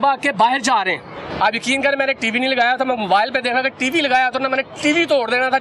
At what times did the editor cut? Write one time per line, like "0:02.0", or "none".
0:01.2